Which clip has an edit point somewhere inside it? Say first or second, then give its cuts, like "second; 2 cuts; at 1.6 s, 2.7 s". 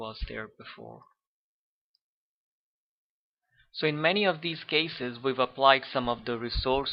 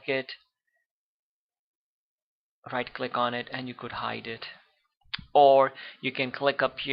second; 1 cut; at 4.0 s